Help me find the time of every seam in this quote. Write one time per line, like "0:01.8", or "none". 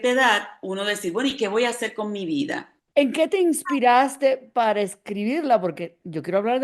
0:02.8

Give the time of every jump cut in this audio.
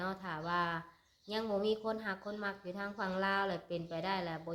none

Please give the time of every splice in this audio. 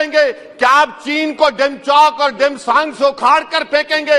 none

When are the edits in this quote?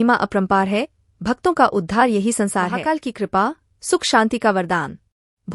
0:02.7

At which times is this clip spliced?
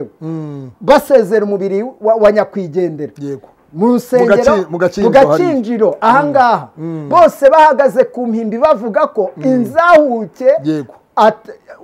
none

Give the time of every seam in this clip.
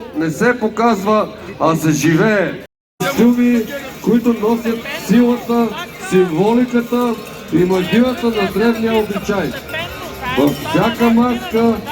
0:02.8

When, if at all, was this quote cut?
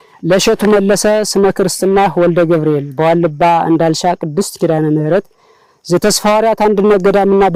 none

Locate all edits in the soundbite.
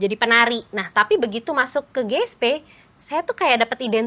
none

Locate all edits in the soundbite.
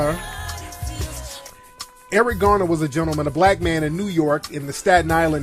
0:02.9

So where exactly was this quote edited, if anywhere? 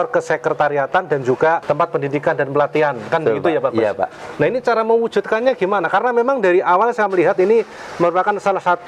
0:01.6

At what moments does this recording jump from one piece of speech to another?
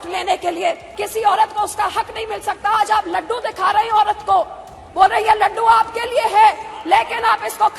0:00.9

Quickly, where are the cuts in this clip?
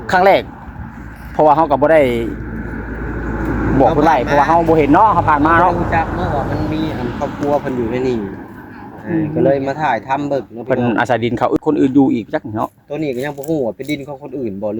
0:11.6

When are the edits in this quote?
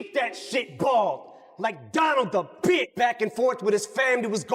0:02.8

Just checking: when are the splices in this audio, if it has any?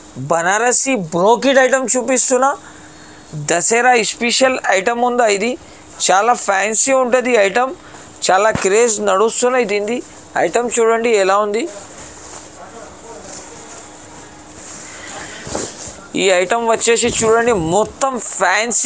none

